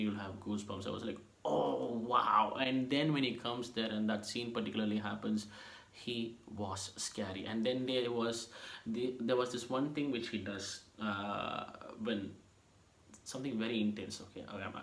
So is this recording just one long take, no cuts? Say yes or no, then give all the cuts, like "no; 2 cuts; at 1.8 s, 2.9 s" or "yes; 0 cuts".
yes; 0 cuts